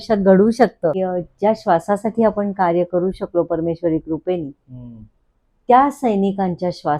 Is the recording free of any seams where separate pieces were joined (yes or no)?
yes